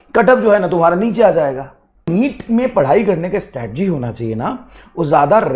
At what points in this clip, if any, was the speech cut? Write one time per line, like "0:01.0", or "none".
0:02.1